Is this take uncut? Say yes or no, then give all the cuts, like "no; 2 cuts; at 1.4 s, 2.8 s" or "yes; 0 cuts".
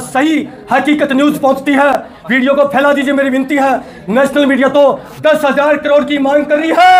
yes; 0 cuts